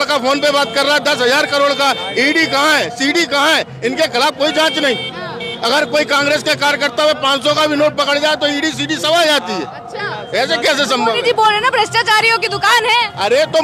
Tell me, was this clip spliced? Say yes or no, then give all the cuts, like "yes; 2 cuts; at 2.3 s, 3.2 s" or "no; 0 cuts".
no; 0 cuts